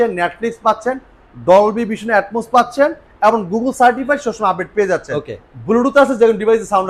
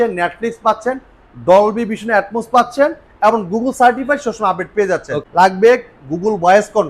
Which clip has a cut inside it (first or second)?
second